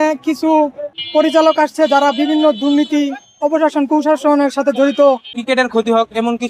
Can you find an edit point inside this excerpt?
yes; 2 cuts; at 0.9 s, 5.3 s

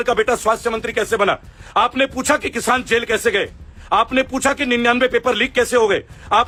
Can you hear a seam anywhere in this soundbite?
no; 0 cuts

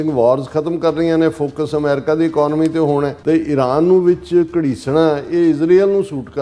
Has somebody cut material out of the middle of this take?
yes; 1 cut; at 3.1 s

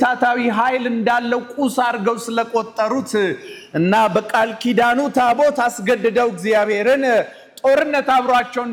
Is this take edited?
no; 0 cuts

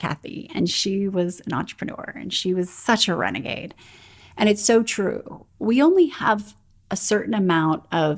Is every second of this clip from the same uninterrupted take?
yes; 0 cuts

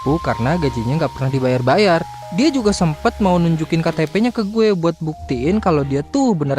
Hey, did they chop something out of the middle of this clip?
yes; 1 cut; at 2.2 s

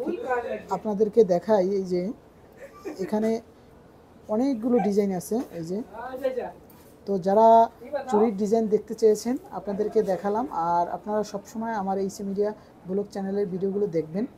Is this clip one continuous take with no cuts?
yes; 0 cuts

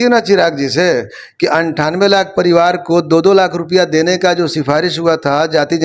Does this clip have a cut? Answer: no; 0 cuts

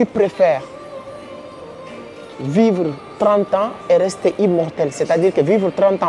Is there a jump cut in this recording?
no; 0 cuts

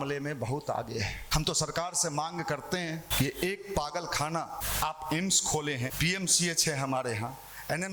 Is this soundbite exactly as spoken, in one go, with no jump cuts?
no; 4 cuts; at 1.3 s, 3.1 s, 4.6 s, 5.9 s

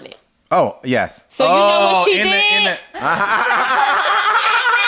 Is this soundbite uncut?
no; 1 cut; at 2.9 s

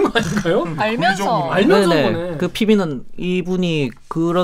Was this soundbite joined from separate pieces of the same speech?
no; 0 cuts

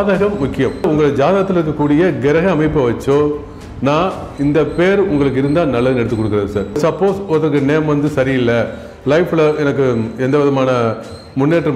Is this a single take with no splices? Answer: no; 2 cuts; at 0.9 s, 6.8 s

